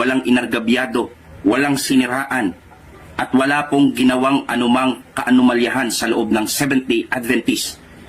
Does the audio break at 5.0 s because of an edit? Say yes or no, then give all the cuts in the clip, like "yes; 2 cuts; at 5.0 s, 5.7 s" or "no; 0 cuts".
no; 0 cuts